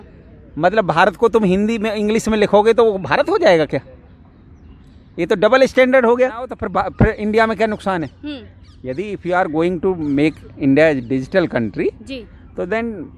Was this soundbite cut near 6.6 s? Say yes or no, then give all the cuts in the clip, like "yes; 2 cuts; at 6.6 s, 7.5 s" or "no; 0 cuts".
yes; 1 cut; at 6.6 s